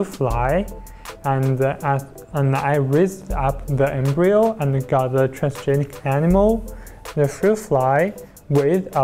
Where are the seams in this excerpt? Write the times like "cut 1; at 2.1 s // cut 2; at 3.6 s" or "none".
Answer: none